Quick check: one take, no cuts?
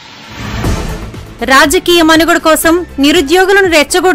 yes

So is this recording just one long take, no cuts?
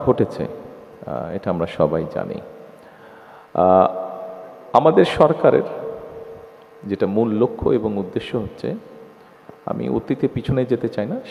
yes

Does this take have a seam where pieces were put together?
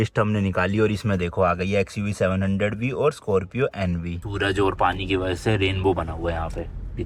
yes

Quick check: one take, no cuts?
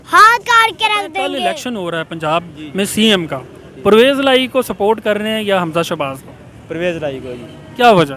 no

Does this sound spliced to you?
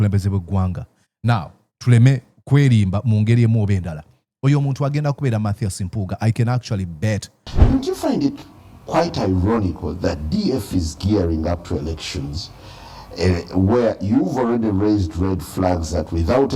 yes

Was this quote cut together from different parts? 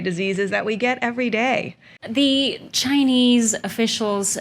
yes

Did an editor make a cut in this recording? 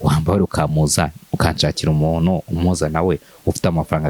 no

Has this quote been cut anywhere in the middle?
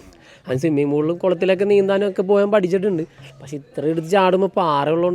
no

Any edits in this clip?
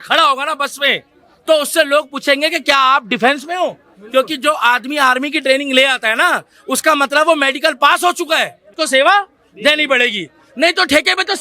yes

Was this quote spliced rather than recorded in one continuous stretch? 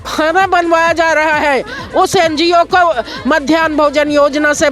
no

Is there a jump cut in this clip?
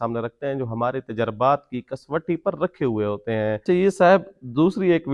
no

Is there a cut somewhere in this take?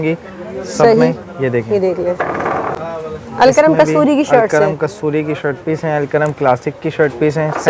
no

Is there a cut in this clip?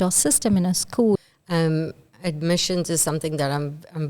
yes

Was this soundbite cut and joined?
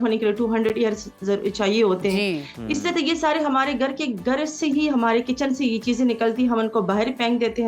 no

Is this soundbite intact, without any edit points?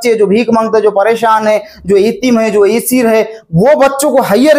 yes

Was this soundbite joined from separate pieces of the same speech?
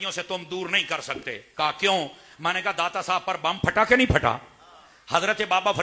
no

